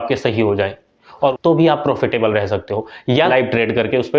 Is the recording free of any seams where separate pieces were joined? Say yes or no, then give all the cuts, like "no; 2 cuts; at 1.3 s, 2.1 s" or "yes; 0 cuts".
no; 2 cuts; at 1.4 s, 3.3 s